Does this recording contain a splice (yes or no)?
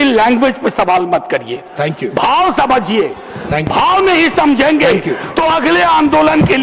no